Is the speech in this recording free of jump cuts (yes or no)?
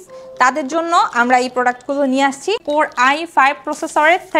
no